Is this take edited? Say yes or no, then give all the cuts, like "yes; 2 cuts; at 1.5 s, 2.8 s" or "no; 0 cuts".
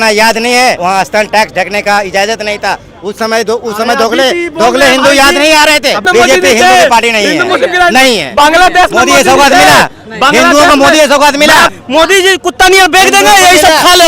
yes; 3 cuts; at 0.8 s, 6.1 s, 11.7 s